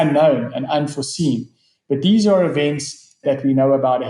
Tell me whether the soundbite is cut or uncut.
cut